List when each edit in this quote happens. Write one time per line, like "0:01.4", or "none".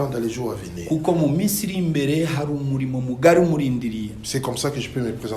none